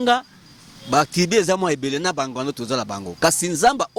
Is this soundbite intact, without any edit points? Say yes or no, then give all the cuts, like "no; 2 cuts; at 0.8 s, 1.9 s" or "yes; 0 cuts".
yes; 0 cuts